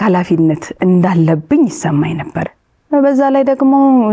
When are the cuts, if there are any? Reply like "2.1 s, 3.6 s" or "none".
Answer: 2.4 s

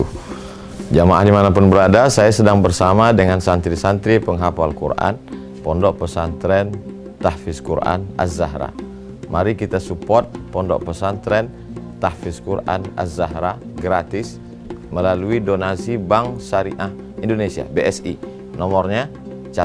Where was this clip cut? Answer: none

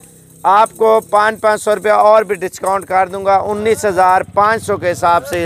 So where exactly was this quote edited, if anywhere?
none

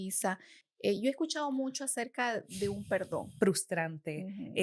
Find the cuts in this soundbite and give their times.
3.3 s

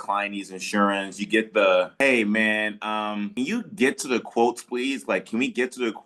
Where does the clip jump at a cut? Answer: 1.9 s, 3.3 s

